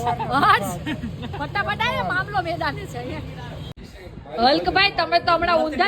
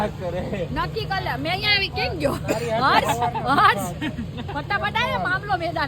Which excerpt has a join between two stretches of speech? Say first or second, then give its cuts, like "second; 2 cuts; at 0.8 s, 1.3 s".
first; 1 cut; at 3.7 s